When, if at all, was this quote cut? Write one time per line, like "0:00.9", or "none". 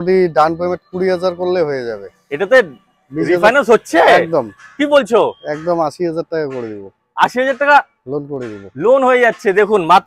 none